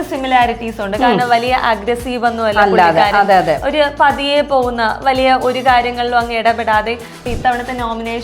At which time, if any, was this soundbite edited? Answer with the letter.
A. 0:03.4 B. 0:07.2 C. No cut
B